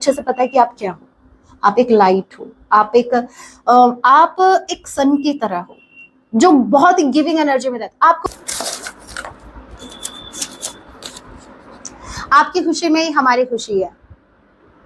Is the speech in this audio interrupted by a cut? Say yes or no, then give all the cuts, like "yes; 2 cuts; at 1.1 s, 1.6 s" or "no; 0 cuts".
yes; 1 cut; at 8.2 s